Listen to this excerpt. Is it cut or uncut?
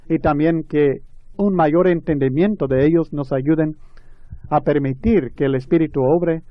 uncut